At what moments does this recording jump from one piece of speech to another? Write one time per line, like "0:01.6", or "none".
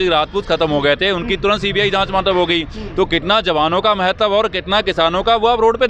none